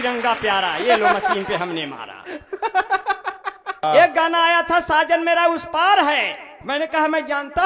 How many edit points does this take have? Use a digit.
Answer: 1